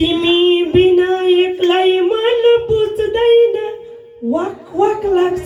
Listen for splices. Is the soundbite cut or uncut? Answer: uncut